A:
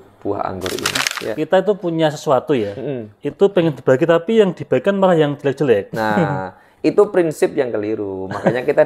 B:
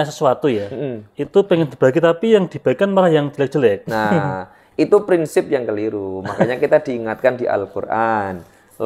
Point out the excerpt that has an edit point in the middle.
A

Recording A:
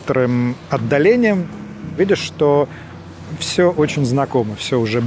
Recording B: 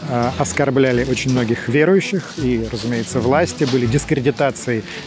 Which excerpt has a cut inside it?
A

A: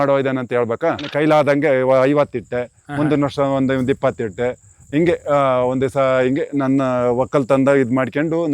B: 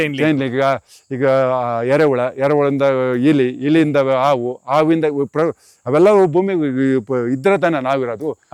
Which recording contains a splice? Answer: A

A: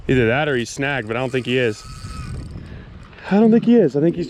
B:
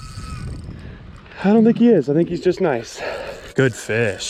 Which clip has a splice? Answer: B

